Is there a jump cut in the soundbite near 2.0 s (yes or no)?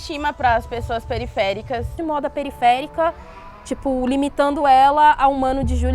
yes